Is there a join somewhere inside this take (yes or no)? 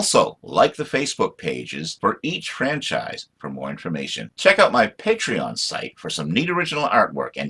no